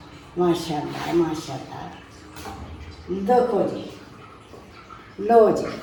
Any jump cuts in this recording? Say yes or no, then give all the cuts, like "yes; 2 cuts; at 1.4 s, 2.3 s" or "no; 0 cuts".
no; 0 cuts